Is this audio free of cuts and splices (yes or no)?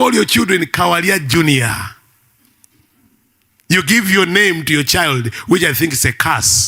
yes